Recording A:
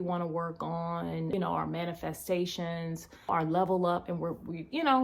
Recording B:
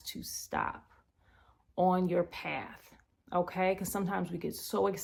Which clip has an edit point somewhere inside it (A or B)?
A